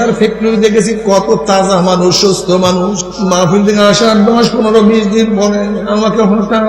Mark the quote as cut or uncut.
cut